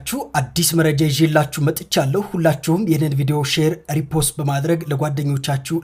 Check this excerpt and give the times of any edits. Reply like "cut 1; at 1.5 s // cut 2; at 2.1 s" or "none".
none